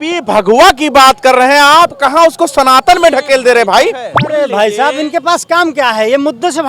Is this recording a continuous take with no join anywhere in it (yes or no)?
no